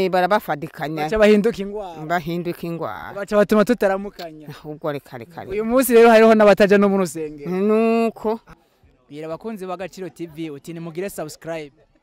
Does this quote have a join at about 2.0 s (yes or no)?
no